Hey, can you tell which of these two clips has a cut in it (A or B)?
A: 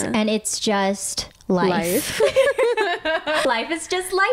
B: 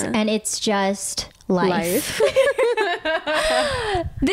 A